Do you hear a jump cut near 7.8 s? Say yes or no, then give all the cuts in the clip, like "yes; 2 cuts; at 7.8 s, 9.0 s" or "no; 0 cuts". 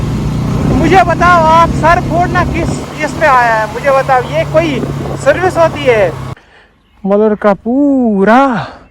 no; 1 cut; at 6.3 s